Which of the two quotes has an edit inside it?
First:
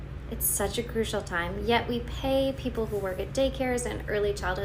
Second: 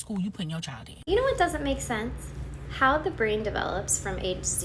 second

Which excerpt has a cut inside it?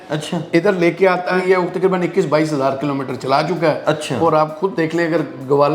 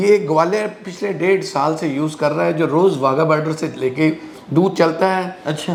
first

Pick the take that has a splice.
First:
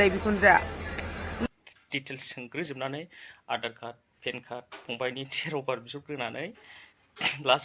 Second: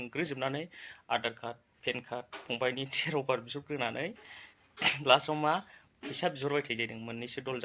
first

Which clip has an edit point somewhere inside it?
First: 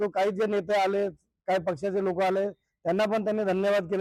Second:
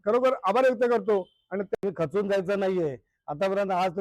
second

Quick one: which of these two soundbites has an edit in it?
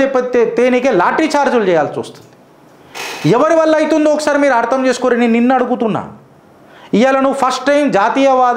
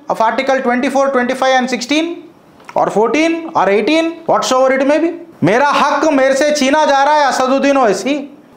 second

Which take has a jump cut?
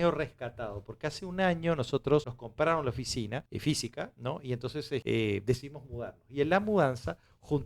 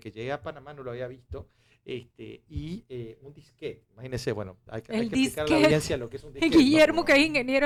first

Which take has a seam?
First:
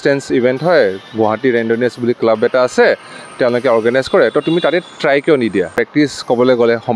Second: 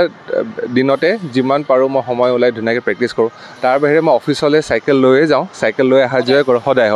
first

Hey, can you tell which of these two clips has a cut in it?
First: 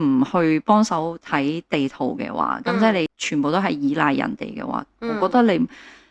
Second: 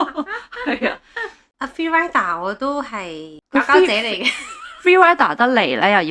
second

